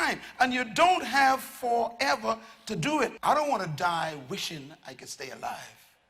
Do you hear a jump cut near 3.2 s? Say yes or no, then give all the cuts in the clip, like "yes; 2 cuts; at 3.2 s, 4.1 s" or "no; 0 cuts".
yes; 1 cut; at 3.2 s